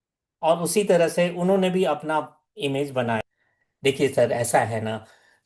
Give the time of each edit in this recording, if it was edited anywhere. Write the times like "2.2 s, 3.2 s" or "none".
3.2 s